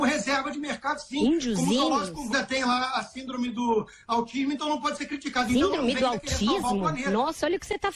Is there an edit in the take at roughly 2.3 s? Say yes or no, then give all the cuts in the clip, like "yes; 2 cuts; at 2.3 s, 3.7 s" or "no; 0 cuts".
yes; 1 cut; at 2.3 s